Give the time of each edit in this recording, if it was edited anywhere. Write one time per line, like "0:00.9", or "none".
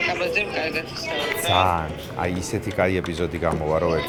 none